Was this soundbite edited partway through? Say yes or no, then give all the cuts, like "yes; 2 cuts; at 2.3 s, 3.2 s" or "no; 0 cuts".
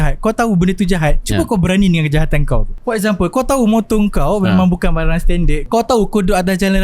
yes; 2 cuts; at 2.7 s, 5.6 s